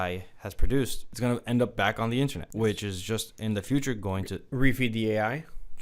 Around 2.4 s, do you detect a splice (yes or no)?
yes